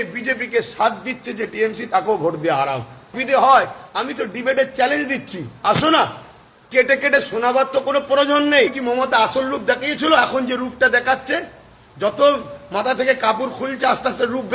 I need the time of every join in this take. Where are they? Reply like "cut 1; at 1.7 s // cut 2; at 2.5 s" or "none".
cut 1; at 3.2 s // cut 2; at 8.8 s